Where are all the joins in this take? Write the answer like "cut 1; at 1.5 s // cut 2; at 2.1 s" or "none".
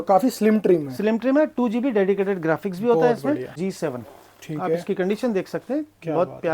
cut 1; at 3.6 s